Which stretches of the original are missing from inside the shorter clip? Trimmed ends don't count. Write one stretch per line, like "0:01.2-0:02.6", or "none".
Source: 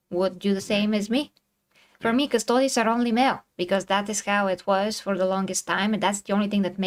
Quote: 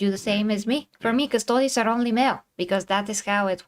0:01.3-0:01.9